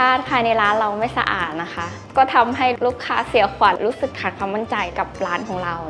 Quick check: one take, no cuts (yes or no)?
no